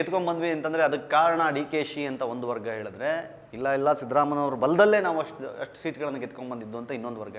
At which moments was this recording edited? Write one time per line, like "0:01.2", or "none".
none